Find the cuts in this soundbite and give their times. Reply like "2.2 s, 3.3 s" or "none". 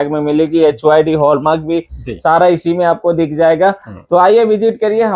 none

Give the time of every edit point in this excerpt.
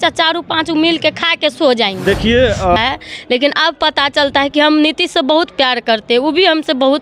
2.8 s

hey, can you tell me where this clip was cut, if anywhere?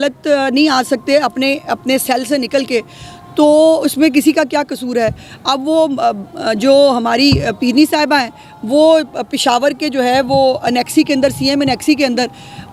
none

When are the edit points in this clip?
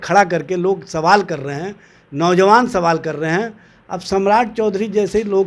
none

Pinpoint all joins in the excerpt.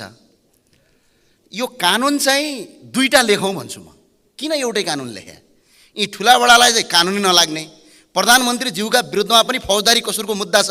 none

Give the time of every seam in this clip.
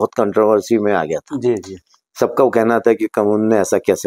none

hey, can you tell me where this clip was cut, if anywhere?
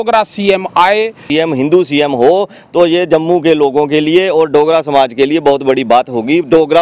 1.3 s

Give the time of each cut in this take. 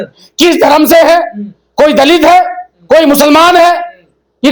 none

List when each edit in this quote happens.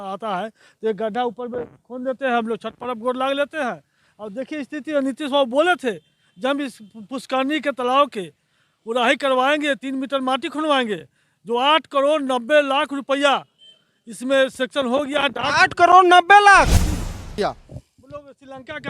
17.3 s

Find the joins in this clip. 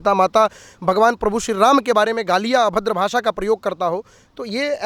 none

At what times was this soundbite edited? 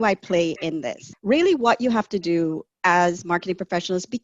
1.0 s

